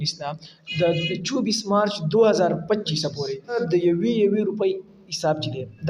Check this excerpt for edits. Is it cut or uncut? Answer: cut